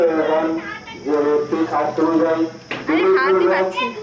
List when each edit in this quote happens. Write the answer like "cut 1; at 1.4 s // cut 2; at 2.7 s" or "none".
none